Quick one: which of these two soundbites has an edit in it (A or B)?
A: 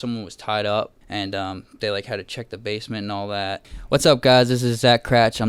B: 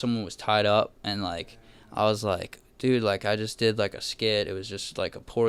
A